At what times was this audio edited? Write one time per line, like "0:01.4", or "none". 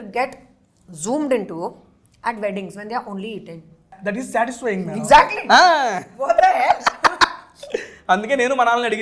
0:04.0